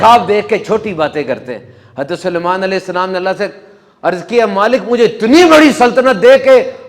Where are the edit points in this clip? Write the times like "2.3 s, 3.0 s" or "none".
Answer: none